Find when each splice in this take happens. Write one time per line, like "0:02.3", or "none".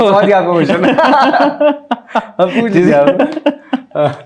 none